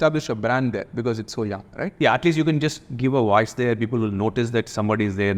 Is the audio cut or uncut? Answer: uncut